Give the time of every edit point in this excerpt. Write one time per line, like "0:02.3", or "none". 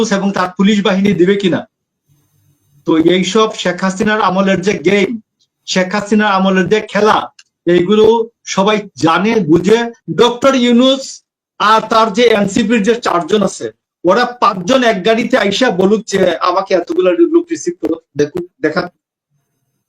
0:10.0